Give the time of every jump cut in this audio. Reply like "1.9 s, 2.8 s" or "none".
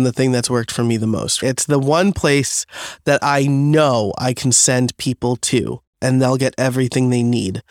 none